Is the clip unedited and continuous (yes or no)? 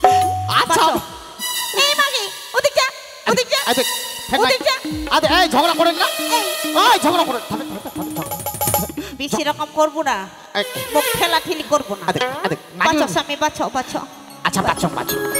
yes